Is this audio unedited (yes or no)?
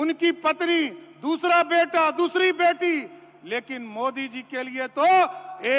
yes